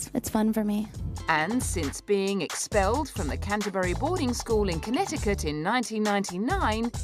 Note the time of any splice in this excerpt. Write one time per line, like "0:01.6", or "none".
0:03.2